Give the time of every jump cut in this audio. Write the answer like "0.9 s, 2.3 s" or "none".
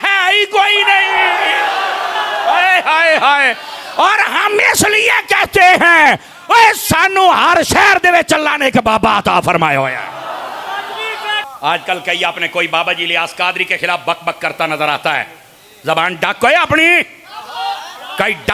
11.4 s

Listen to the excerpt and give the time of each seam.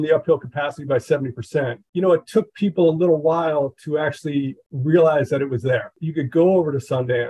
6.0 s

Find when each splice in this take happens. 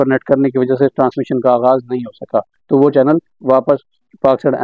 2.5 s

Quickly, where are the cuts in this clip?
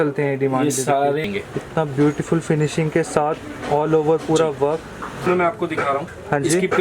1.3 s, 5.2 s

